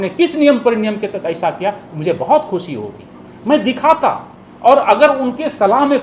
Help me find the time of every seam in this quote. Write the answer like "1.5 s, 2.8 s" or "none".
none